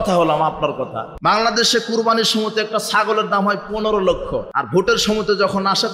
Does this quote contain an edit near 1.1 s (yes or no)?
yes